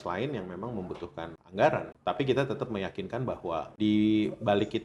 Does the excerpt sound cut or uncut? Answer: cut